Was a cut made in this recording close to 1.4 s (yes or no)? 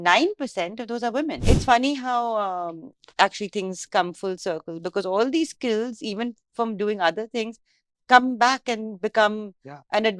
yes